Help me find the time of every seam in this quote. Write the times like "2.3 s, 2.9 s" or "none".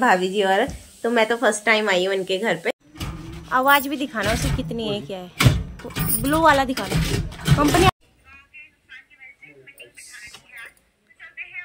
2.7 s, 7.9 s